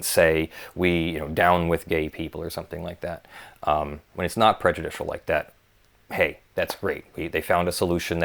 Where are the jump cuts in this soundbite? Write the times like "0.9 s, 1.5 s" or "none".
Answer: none